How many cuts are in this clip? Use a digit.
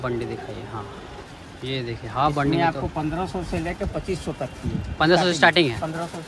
0